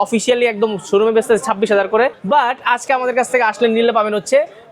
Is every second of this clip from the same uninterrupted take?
no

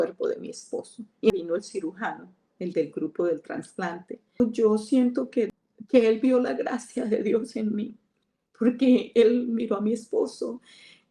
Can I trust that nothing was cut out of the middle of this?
no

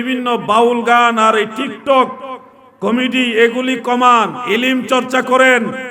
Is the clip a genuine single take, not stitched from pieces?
yes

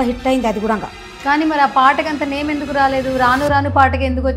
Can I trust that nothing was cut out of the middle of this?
yes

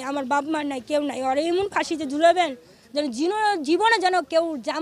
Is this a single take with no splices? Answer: yes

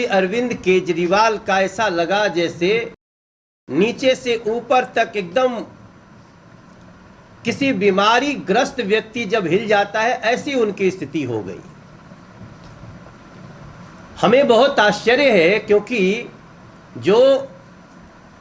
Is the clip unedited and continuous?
yes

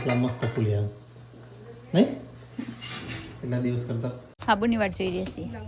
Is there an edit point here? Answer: yes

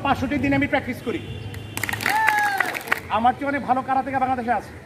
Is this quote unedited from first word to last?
no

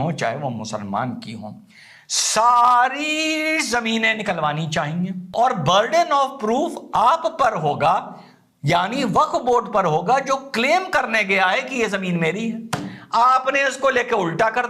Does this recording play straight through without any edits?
no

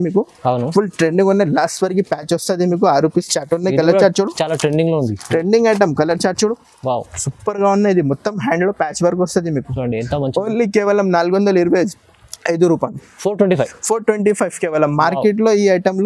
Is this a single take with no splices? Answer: yes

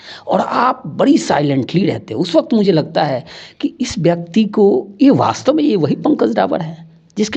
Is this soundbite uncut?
yes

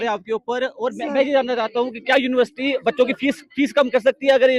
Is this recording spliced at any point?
no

